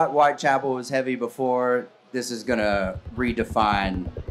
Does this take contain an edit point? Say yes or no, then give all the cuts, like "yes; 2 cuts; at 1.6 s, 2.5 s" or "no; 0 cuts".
no; 0 cuts